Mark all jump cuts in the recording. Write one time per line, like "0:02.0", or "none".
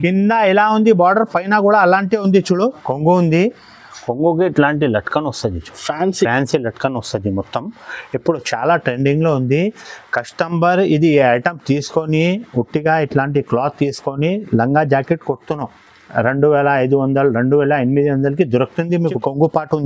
0:02.8
0:19.1

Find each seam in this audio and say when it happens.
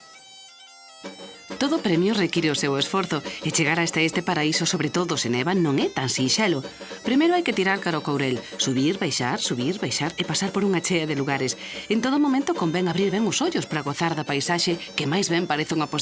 0:12.6

